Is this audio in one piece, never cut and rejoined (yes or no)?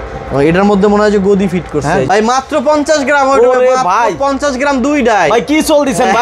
no